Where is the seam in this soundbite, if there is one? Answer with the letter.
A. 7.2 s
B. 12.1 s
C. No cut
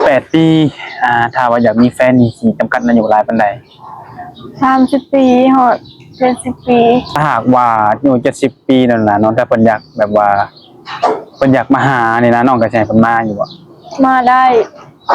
A